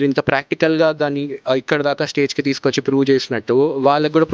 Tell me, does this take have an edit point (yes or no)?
no